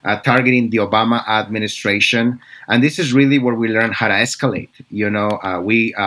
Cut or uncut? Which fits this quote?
uncut